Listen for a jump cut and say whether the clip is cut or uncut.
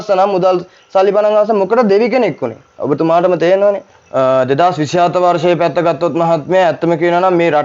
cut